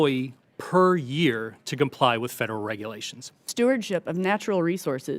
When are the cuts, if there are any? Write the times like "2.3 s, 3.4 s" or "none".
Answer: 3.5 s